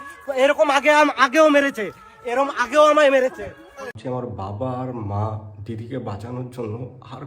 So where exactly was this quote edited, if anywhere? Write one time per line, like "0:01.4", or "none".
0:04.0